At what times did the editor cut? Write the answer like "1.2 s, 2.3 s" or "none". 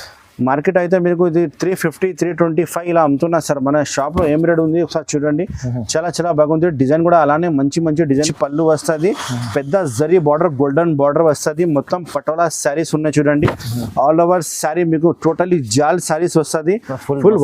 8.3 s